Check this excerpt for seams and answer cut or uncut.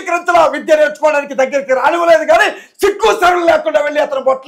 uncut